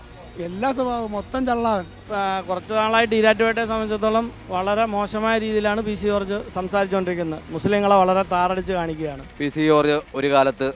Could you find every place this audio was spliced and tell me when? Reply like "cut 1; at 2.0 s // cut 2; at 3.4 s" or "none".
cut 1; at 2.0 s // cut 2; at 9.2 s